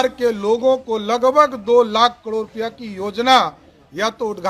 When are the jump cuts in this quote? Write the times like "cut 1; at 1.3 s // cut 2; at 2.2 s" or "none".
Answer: none